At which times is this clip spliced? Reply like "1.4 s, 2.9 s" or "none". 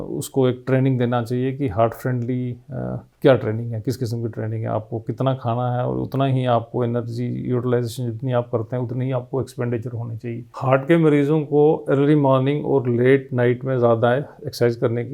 10.5 s

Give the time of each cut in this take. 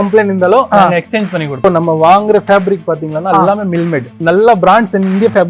1.6 s, 4.2 s

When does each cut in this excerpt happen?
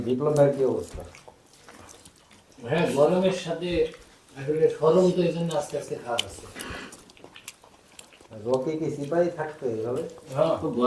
none

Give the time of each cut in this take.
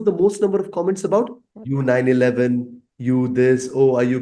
none

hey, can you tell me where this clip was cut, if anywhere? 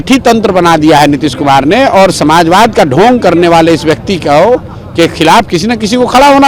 none

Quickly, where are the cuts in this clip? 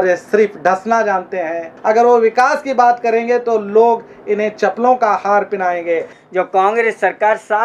1.7 s, 6.1 s

